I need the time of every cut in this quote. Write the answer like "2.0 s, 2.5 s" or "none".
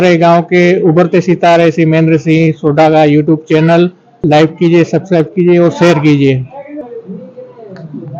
3.0 s, 4.2 s, 6.8 s